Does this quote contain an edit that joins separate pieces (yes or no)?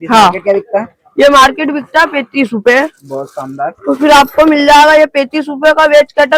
no